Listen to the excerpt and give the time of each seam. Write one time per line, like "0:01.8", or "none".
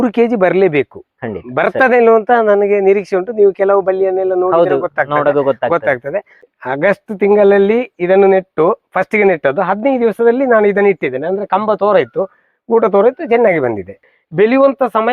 0:06.4
0:14.1